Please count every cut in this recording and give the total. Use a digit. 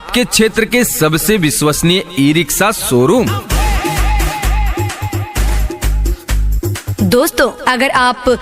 2